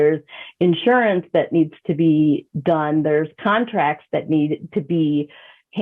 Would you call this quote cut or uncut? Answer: uncut